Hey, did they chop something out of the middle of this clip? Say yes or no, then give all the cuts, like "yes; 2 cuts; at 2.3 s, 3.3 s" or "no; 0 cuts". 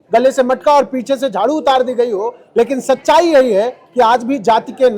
no; 0 cuts